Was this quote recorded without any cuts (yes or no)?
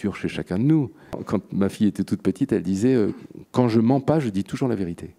no